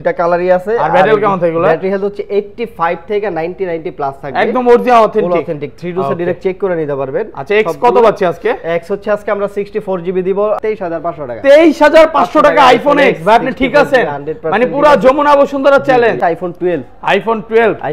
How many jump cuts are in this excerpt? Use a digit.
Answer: 2